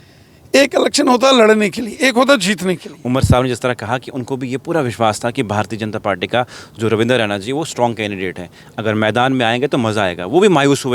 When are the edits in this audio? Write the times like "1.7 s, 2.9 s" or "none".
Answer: 2.9 s